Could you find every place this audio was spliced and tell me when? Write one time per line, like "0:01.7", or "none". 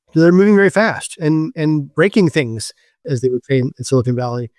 0:03.0